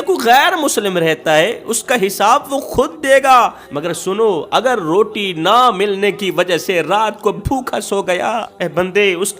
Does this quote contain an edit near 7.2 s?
no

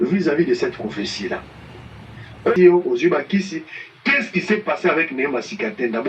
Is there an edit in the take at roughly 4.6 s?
no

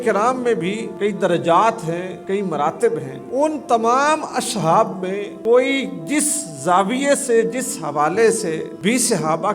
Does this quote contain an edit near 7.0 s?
no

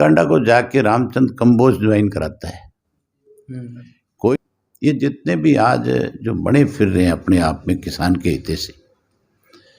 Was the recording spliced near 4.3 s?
yes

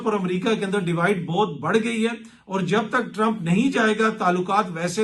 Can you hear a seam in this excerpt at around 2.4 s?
no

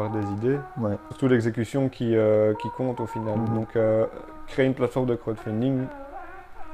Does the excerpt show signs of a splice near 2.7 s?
no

